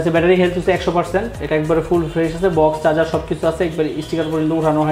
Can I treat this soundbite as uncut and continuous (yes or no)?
yes